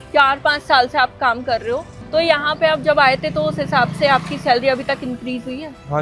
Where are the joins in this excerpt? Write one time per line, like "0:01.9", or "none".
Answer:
0:02.0